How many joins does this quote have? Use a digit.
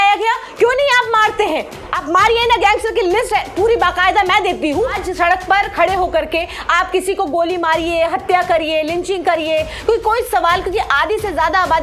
1